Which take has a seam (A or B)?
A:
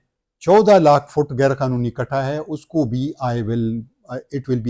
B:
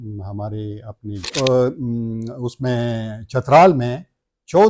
B